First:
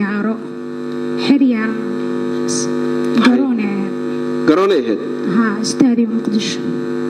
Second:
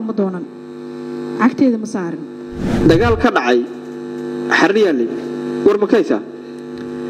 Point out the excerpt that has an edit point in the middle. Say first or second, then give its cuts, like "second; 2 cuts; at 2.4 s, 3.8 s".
second; 1 cut; at 2.7 s